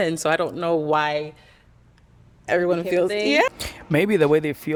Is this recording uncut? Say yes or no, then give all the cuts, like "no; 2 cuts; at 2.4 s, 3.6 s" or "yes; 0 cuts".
yes; 0 cuts